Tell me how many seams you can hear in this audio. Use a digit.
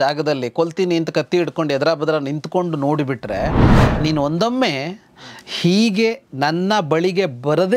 1